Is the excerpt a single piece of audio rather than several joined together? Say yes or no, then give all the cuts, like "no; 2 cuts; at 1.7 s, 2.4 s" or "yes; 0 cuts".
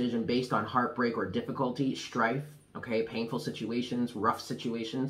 yes; 0 cuts